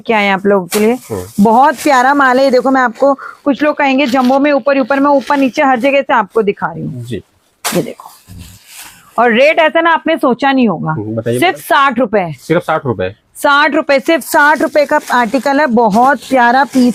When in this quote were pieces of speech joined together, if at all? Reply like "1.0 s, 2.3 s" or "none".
none

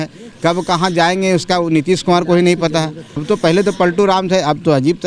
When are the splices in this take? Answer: 3.2 s

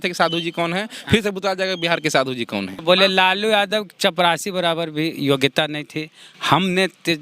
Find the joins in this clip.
2.7 s

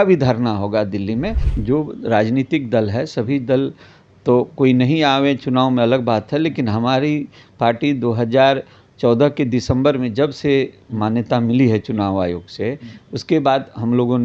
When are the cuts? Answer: 1.5 s

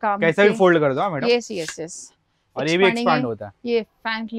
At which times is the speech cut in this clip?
none

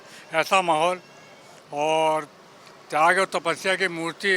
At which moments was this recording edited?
none

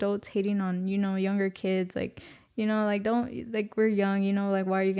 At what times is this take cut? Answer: none

